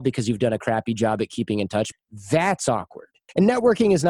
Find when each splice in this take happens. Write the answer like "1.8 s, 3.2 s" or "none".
1.9 s, 3.2 s